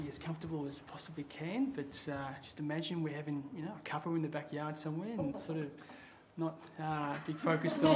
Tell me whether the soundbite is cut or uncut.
uncut